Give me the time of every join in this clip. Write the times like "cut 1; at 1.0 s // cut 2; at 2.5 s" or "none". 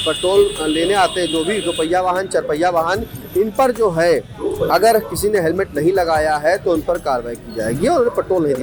none

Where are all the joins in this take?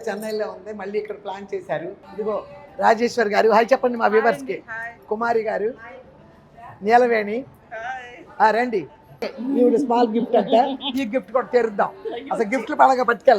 cut 1; at 2.0 s // cut 2; at 9.3 s

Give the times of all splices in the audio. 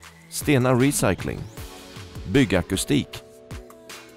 none

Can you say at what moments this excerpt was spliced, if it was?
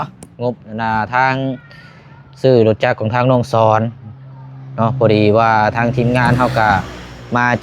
none

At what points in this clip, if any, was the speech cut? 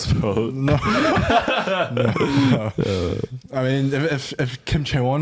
none

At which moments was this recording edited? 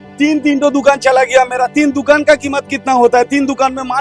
none

